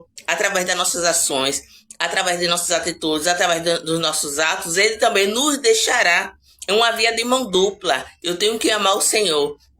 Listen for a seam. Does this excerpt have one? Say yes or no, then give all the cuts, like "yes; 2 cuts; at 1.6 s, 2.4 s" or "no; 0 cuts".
yes; 1 cut; at 6.9 s